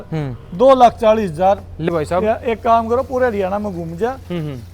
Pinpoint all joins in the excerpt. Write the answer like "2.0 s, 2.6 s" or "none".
1.8 s